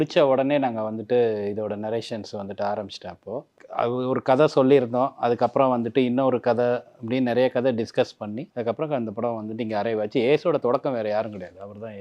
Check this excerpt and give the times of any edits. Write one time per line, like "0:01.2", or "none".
0:03.6
0:08.4